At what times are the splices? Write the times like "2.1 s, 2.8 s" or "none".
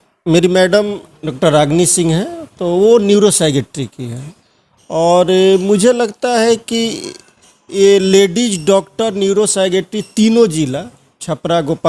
none